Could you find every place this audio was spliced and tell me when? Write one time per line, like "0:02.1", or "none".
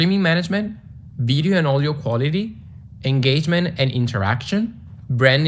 0:01.4